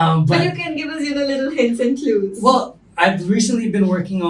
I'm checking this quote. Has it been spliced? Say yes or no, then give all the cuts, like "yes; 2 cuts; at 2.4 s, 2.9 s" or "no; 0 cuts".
no; 0 cuts